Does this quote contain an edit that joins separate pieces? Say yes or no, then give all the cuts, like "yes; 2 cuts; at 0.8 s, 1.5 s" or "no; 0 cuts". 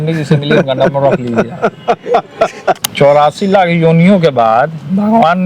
yes; 1 cut; at 2.8 s